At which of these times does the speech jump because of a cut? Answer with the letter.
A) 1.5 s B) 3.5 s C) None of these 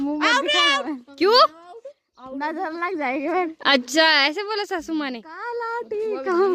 C